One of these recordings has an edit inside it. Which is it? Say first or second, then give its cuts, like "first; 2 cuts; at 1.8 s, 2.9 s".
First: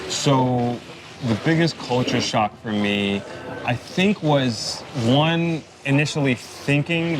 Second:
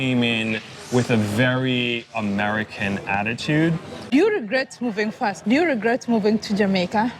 second; 1 cut; at 4.0 s